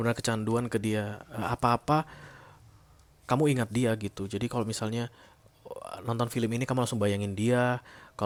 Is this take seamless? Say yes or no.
yes